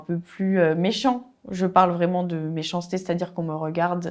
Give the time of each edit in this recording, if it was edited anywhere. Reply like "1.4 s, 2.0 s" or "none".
none